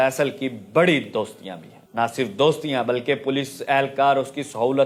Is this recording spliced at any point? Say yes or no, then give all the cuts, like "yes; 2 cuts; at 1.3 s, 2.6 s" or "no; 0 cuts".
no; 0 cuts